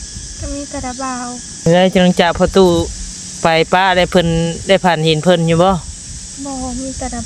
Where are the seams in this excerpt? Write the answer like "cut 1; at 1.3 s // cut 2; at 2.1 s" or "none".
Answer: cut 1; at 1.7 s